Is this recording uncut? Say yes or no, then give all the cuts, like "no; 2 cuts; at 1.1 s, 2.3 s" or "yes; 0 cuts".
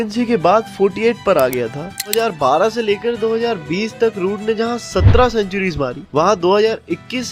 no; 1 cut; at 2.1 s